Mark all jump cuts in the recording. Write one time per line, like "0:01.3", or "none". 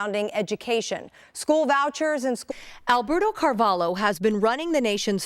none